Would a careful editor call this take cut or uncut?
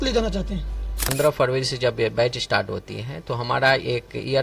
cut